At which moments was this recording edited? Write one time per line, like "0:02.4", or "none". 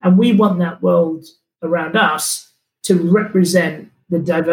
none